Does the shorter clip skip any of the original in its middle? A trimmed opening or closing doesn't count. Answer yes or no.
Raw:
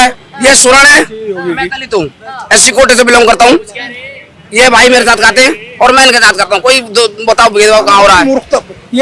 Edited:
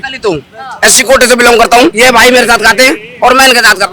yes